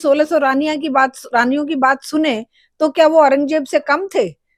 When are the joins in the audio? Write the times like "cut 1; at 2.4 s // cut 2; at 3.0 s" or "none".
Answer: none